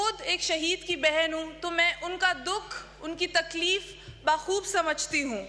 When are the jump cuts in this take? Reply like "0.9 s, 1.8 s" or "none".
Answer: none

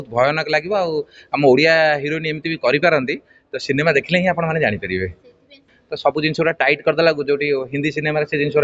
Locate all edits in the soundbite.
5.7 s

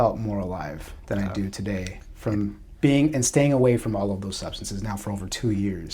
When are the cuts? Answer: none

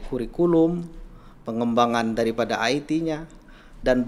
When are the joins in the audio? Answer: none

